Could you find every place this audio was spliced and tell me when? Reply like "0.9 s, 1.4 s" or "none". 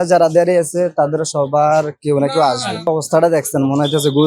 2.9 s